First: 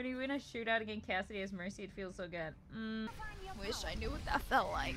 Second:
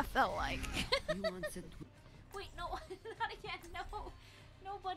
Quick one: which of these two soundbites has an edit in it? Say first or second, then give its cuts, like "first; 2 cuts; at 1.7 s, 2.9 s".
second; 1 cut; at 1.8 s